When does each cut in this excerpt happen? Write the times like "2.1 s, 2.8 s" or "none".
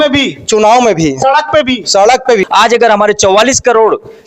2.4 s